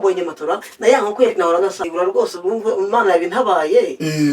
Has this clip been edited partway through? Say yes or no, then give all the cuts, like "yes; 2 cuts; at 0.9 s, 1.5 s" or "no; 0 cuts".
yes; 1 cut; at 1.9 s